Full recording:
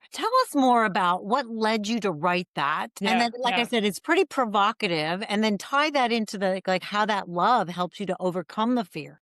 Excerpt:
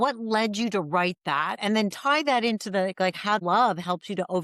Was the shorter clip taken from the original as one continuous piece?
no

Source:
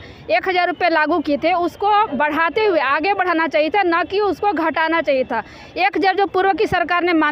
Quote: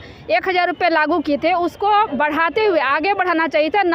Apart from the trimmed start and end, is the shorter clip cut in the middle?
no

